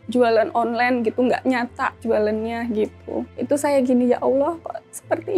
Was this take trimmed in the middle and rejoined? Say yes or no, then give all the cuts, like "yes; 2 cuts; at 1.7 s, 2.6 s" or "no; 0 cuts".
yes; 1 cut; at 3.3 s